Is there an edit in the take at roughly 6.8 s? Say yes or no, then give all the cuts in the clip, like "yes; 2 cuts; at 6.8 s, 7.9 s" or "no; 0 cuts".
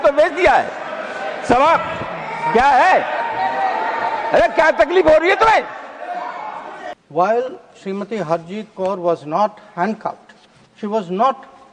yes; 1 cut; at 6.8 s